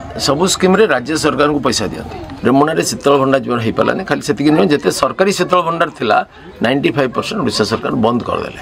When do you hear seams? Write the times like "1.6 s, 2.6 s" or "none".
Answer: 2.3 s